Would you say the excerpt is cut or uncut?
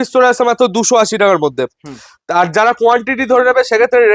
uncut